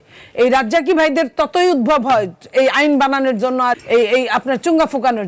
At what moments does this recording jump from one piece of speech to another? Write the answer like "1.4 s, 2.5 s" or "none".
3.7 s